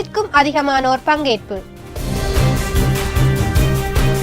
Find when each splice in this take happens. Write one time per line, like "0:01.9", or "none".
0:02.0